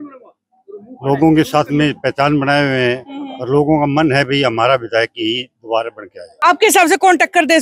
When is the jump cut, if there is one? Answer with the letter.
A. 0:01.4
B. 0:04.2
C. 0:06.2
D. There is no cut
C